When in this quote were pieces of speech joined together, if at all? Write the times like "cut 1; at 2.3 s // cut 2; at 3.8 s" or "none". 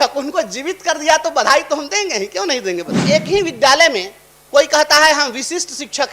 cut 1; at 3.1 s